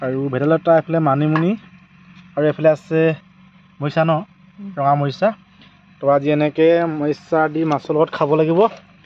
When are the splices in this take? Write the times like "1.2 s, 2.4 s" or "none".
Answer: none